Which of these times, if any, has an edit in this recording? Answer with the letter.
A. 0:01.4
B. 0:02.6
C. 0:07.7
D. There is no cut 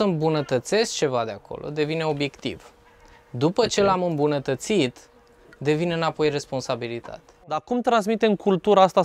C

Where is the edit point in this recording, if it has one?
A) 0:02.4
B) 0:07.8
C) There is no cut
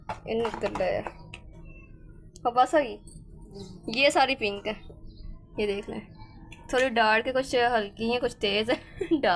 B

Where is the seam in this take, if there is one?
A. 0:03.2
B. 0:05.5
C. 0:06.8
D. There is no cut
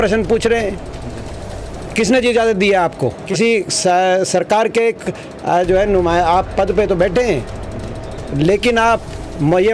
A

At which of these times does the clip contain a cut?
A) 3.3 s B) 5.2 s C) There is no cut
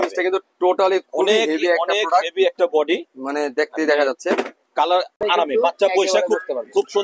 B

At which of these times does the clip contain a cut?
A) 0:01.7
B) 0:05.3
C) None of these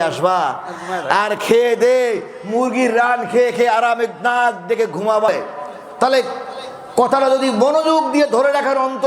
B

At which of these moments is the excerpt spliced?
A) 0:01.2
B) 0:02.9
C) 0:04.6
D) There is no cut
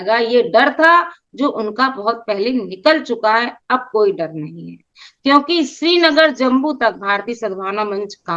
D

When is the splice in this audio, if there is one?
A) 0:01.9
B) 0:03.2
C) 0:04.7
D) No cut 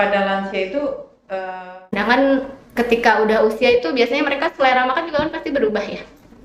A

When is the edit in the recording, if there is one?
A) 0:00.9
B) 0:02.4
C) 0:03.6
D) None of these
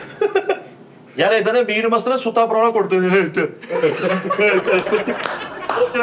A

